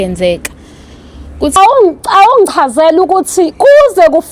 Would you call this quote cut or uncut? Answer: cut